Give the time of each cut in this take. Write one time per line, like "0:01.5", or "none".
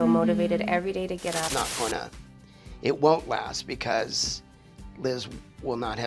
0:01.4